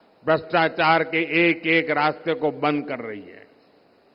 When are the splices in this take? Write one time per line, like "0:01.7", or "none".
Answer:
none